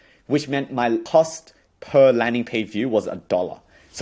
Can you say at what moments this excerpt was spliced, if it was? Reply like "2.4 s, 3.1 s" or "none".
1.0 s